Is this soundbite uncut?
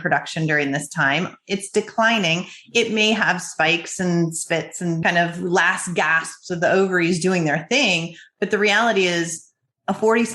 no; 1 cut; at 5.0 s

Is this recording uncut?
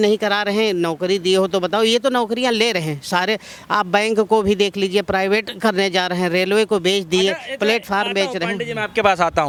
yes; 0 cuts

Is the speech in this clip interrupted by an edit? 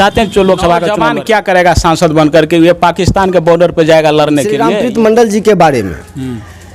yes; 2 cuts; at 1.0 s, 4.7 s

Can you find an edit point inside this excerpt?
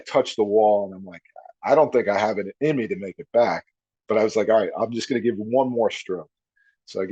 no; 0 cuts

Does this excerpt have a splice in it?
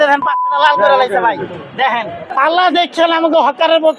yes; 1 cut; at 2.2 s

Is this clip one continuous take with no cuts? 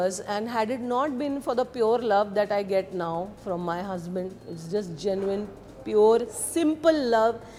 yes; 0 cuts

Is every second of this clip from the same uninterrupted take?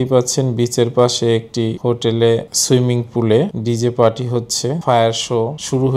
no; 1 cut; at 4.8 s

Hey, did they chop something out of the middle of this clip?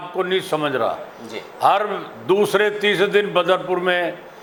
no; 0 cuts

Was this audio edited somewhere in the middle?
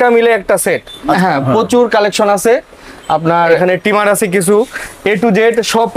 yes; 2 cuts; at 1.1 s, 3.6 s

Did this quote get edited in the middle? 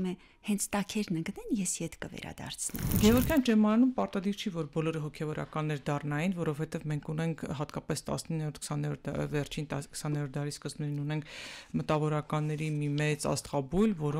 yes; 1 cut; at 2.9 s

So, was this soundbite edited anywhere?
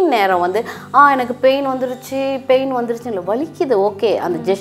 no; 0 cuts

